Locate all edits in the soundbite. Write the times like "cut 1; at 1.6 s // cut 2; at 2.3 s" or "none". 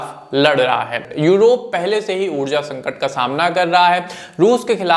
cut 1; at 1.0 s